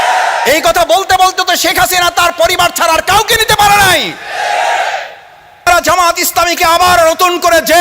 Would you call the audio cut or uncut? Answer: cut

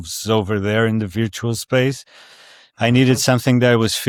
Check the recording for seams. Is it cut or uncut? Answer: uncut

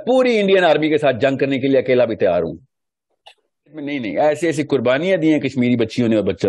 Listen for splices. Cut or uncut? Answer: cut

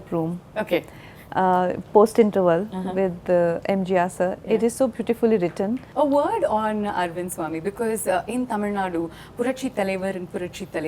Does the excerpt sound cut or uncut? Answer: cut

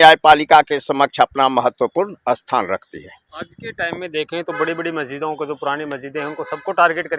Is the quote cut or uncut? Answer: uncut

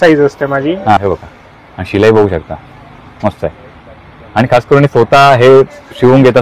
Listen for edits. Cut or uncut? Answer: cut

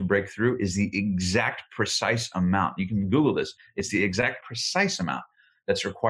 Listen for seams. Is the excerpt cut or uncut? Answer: cut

